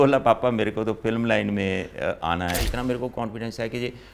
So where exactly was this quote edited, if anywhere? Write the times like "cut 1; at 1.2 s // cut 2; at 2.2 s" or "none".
cut 1; at 2.6 s